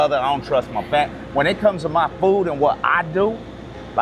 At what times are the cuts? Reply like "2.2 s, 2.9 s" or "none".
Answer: none